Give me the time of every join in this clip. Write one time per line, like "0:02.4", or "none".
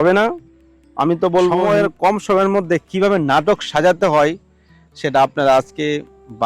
0:01.6